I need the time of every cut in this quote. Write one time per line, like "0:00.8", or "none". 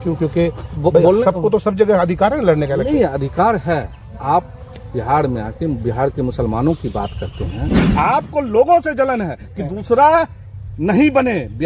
0:07.9

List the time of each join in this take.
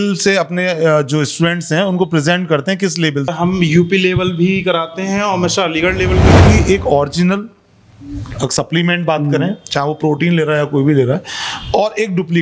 0:03.3
0:06.3

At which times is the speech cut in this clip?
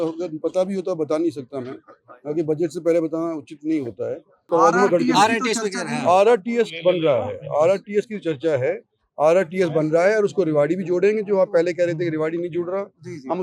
0:04.4

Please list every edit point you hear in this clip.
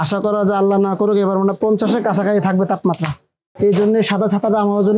none

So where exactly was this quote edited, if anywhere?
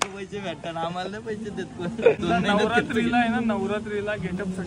0:02.2

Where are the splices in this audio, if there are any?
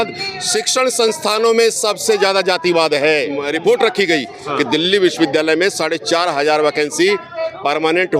0:03.4

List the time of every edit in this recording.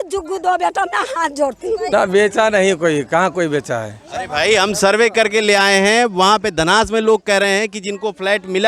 0:01.9

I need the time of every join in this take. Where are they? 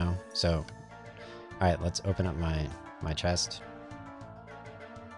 none

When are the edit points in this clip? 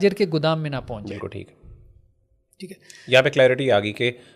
none

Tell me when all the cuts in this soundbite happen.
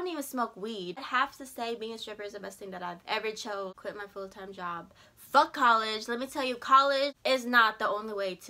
0:01.0
0:03.7
0:07.2

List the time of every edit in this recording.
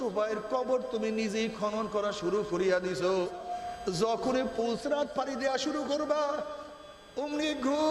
0:03.6

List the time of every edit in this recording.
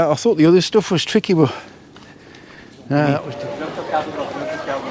0:03.3

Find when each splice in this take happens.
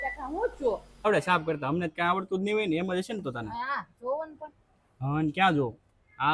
0:01.1

